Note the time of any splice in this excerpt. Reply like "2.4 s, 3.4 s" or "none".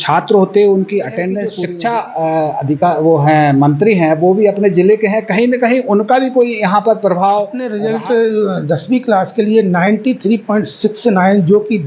1.6 s, 7.8 s